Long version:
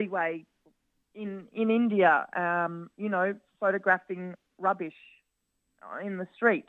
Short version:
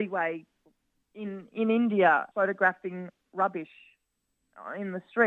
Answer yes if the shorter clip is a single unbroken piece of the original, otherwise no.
no